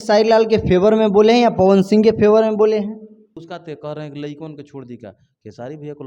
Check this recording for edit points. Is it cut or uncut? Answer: cut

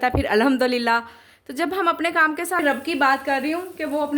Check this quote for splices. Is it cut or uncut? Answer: cut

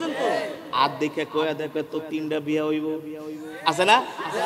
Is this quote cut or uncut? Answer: uncut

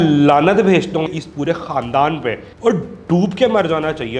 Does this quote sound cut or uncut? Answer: cut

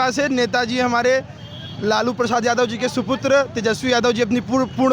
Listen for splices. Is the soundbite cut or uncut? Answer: uncut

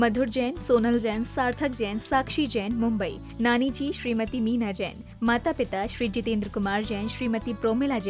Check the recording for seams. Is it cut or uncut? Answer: uncut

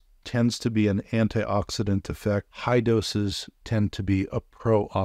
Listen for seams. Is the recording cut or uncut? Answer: uncut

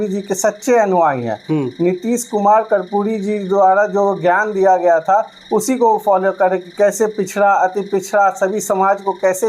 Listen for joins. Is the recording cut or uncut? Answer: uncut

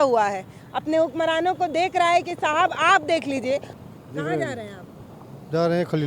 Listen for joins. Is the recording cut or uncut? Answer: cut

